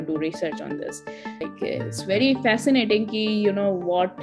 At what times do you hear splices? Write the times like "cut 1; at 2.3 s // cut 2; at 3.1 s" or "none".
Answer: cut 1; at 1.5 s

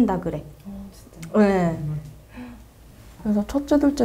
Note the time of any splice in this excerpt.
cut 1; at 3.1 s

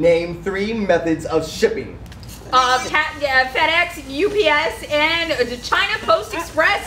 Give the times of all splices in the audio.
none

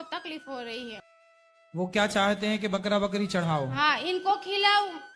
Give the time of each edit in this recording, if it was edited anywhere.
cut 1; at 1.1 s

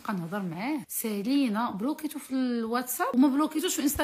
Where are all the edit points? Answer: cut 1; at 0.9 s // cut 2; at 3.1 s

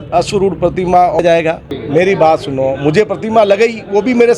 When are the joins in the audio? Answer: cut 1; at 1.2 s

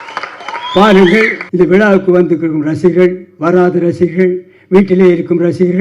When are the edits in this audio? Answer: cut 1; at 1.4 s

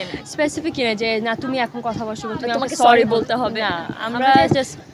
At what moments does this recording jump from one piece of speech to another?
none

